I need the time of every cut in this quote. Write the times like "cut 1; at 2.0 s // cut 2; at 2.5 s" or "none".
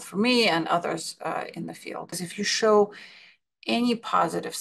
cut 1; at 2.2 s